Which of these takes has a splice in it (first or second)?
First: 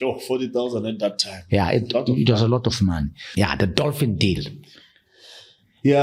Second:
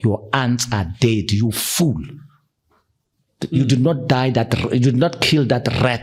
first